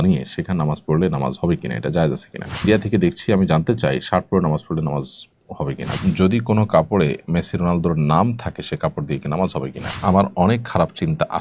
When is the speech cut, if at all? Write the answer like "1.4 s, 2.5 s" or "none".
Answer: 2.7 s, 6.0 s, 9.9 s